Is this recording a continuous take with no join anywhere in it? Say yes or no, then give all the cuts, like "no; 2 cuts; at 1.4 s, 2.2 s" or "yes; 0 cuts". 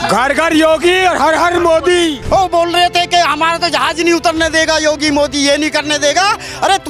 no; 1 cut; at 2.2 s